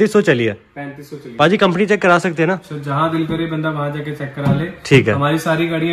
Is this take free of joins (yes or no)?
yes